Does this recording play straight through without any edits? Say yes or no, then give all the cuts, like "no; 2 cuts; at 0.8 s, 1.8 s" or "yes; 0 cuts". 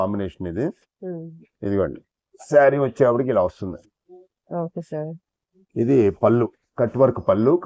yes; 0 cuts